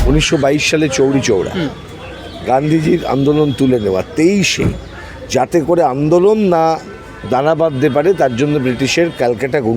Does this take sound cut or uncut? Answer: uncut